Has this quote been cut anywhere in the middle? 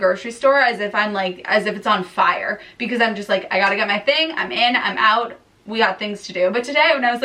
no; 0 cuts

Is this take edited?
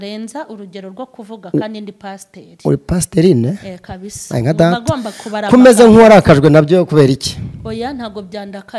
no; 0 cuts

